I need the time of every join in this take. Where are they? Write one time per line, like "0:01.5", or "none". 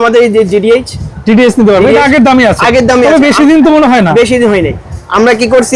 none